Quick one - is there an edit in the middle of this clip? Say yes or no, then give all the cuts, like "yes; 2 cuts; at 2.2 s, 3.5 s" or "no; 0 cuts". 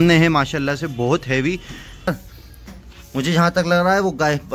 yes; 1 cut; at 2.1 s